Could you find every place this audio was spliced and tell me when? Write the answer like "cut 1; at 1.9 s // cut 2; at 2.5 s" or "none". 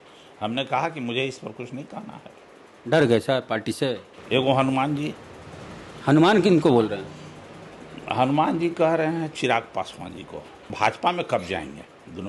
cut 1; at 4.1 s // cut 2; at 10.7 s

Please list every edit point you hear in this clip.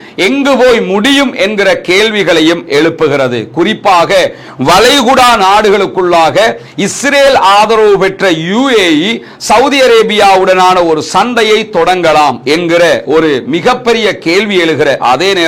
none

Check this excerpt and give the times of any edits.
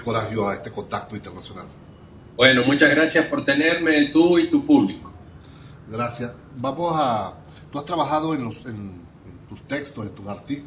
cut 1; at 3.7 s

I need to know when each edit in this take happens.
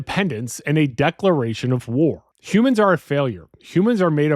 cut 1; at 2.2 s

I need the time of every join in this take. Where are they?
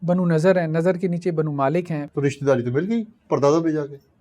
cut 1; at 2.0 s

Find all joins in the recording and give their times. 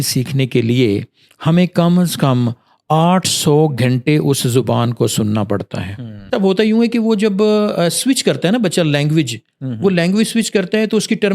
cut 1; at 6.3 s

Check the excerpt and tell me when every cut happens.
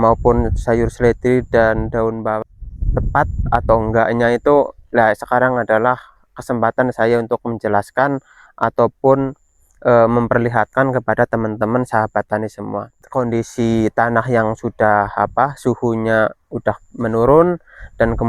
cut 1; at 2.4 s // cut 2; at 13.0 s

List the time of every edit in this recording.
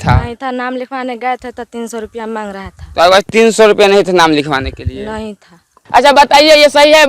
cut 1; at 5.8 s

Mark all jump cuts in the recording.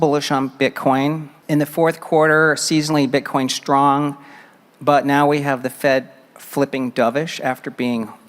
cut 1; at 1.3 s

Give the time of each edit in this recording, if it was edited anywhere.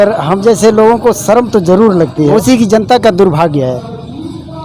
cut 1; at 2.3 s

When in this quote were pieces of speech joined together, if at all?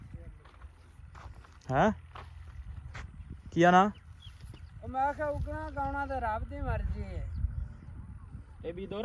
none

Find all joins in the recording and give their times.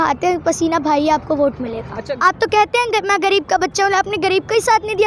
cut 1; at 2.1 s

